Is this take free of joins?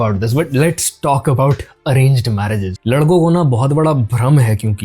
no; 1 cut; at 2.7 s

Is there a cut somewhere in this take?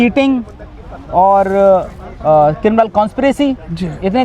no; 0 cuts

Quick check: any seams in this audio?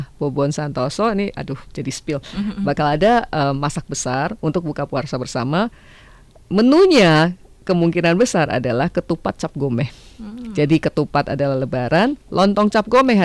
no; 0 cuts

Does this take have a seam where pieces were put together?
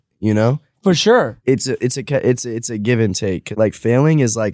yes; 2 cuts; at 1.4 s, 3.5 s

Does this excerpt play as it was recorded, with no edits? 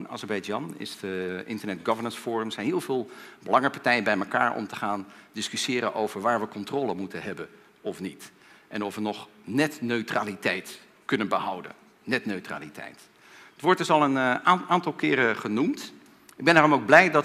no; 1 cut; at 10.3 s

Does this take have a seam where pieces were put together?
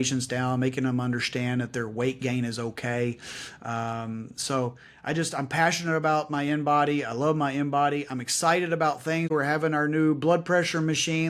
yes; 1 cut; at 9.3 s

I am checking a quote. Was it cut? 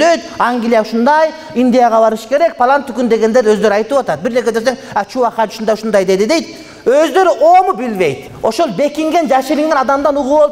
yes; 1 cut; at 8.3 s

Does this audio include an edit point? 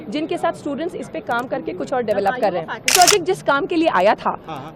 yes; 1 cut; at 2.9 s

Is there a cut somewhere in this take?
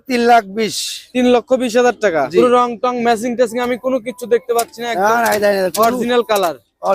yes; 1 cut; at 2.3 s

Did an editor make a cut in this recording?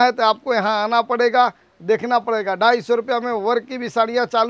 no; 0 cuts

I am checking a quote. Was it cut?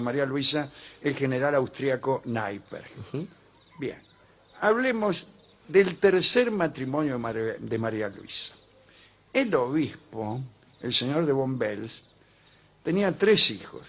no; 0 cuts

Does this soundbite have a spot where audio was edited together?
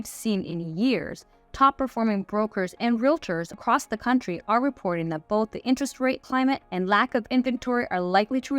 yes; 2 cuts; at 3.5 s, 6.4 s

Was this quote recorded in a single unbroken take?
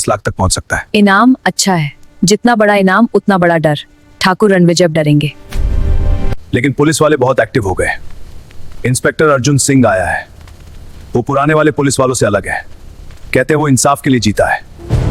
yes; 0 cuts

